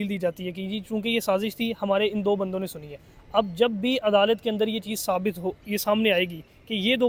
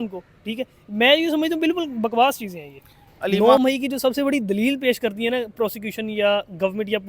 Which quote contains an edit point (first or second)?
second